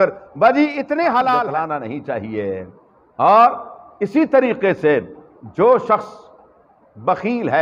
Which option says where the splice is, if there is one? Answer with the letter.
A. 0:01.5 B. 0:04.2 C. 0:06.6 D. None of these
A